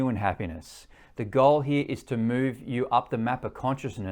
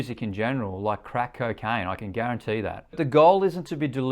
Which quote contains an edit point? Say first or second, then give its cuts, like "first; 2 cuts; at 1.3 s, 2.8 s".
second; 1 cut; at 2.9 s